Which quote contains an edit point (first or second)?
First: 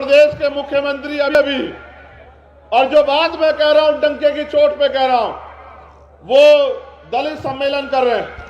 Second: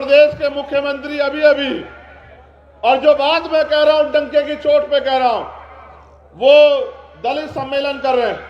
first